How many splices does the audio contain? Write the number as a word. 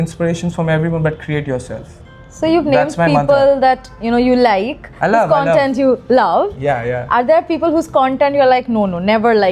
zero